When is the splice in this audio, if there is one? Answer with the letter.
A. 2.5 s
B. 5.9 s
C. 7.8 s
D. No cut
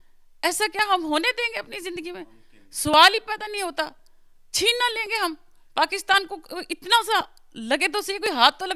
D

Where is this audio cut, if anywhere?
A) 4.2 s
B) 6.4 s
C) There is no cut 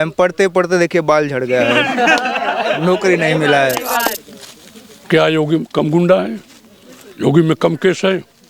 A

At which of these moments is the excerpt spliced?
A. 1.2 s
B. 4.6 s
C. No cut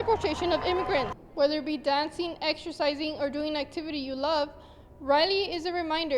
A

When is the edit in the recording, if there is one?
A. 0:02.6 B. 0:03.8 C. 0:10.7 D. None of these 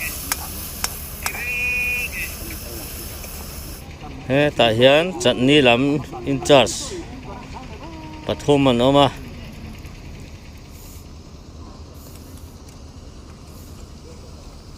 B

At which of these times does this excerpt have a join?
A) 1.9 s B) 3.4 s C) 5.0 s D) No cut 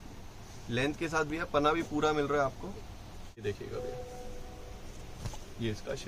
B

